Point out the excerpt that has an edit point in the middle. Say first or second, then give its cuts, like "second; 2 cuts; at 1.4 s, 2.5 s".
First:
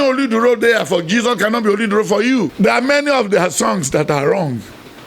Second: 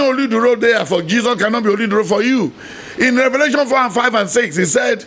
first; 1 cut; at 2.5 s